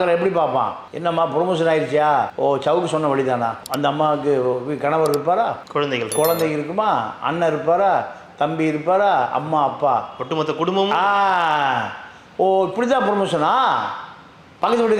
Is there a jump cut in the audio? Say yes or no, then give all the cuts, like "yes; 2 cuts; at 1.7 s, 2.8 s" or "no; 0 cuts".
no; 0 cuts